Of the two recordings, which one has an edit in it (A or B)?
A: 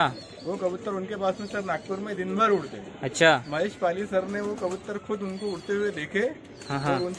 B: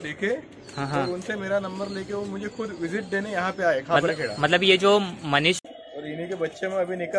B